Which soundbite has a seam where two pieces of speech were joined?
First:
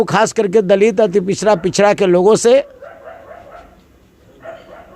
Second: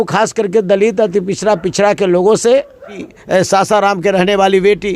second; 1 cut; at 3.1 s

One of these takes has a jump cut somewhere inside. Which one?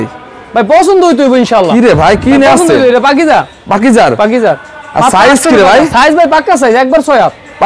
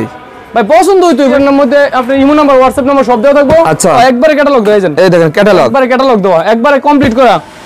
second; 2 cuts; at 1.3 s, 4.0 s

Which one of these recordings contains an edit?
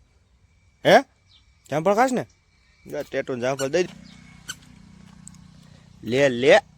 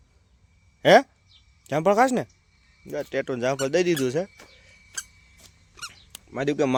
first; 1 cut; at 3.8 s

